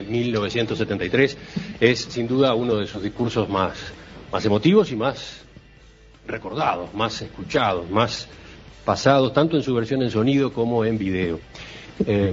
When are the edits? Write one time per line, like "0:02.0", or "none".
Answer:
0:07.4